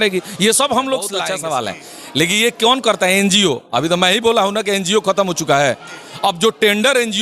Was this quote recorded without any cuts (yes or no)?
no